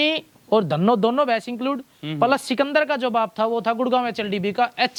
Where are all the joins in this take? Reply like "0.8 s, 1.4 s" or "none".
none